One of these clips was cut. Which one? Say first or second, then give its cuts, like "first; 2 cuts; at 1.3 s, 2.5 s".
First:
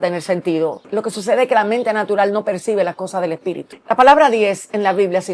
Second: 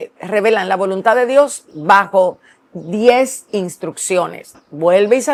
first; 2 cuts; at 0.9 s, 3.7 s